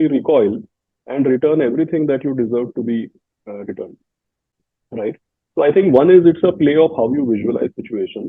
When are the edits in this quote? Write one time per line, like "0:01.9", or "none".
none

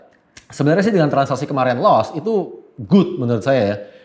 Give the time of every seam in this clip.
none

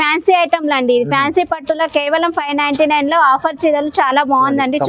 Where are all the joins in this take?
none

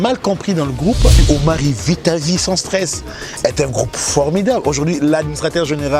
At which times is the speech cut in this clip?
0:01.2

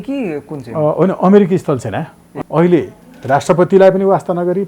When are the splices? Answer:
0:02.3

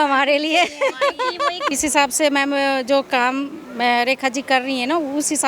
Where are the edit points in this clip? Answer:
0:01.7

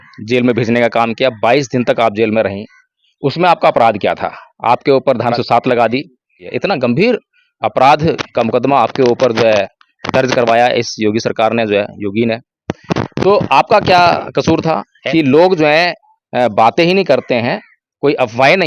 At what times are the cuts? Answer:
0:05.3
0:06.4
0:14.9

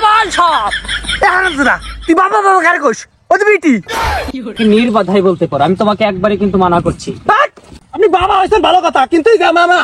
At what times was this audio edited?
0:04.5

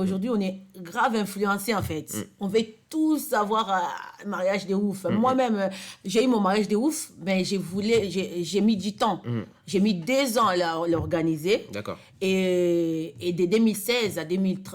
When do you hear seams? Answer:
none

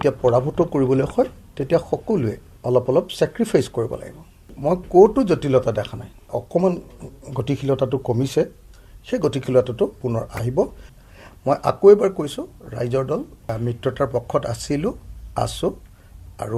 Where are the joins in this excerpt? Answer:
0:02.5
0:04.5
0:06.4
0:10.9

